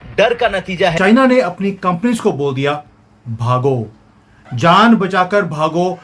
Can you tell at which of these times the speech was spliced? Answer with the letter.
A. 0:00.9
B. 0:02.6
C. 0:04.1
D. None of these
A